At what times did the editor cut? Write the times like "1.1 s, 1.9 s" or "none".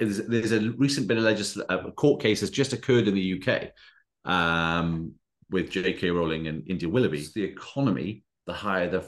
7.3 s